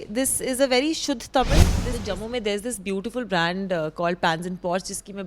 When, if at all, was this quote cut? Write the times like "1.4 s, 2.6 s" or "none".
1.8 s